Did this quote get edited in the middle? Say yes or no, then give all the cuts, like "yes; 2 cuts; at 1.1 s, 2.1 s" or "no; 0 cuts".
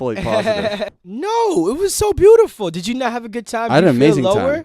yes; 1 cut; at 0.9 s